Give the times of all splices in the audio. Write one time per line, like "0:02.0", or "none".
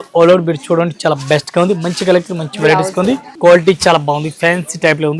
0:03.3